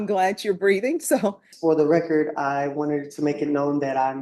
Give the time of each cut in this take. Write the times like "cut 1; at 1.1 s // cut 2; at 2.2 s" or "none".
cut 1; at 1.5 s